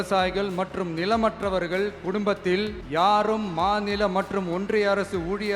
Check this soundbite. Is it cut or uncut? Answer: cut